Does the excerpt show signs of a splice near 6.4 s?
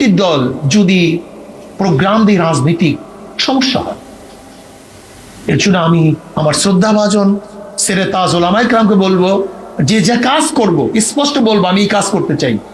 no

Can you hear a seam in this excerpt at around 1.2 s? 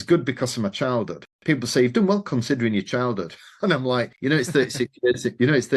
no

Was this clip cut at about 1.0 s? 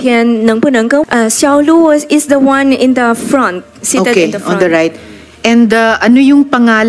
yes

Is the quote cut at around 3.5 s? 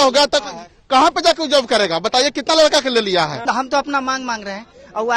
yes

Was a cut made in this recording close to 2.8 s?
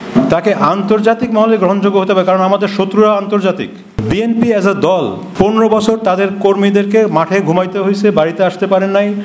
no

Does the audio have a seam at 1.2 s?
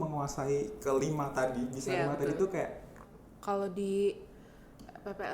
no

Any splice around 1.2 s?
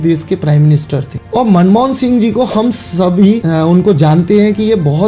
yes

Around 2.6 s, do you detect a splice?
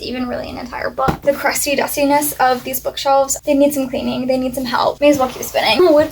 no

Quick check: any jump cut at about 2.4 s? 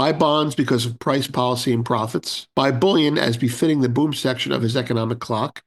yes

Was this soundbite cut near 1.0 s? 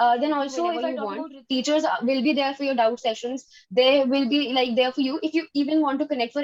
yes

